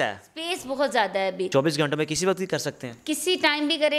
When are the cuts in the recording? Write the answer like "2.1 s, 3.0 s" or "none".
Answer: 1.5 s